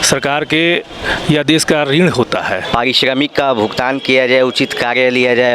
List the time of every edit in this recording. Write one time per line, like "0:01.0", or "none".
0:02.6

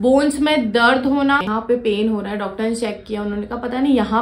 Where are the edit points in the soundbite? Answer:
0:01.5

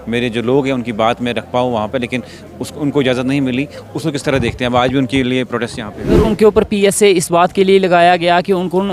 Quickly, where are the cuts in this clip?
0:06.2

